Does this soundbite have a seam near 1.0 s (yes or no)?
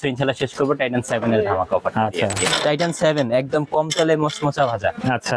no